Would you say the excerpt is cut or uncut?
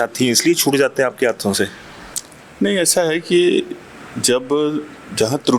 uncut